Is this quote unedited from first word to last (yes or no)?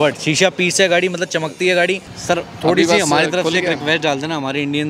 no